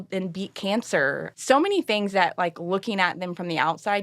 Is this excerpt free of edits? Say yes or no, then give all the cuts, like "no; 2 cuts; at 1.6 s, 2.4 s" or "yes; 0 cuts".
no; 1 cut; at 1.2 s